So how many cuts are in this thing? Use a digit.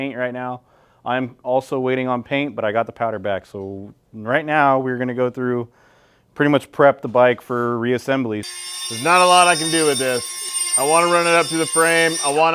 1